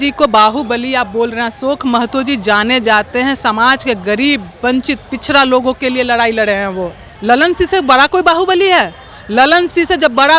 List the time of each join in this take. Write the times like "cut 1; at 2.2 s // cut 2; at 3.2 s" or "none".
cut 1; at 7.1 s